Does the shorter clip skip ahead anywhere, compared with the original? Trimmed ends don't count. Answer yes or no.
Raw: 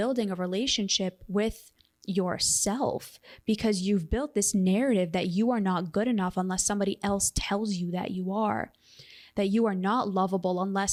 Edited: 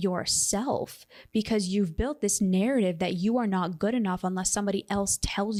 no